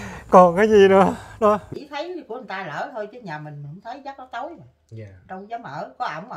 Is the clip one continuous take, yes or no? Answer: no